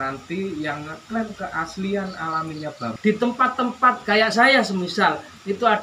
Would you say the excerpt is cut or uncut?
cut